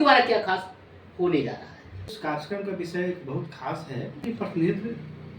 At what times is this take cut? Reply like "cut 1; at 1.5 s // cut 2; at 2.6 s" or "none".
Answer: cut 1; at 2.1 s // cut 2; at 4.2 s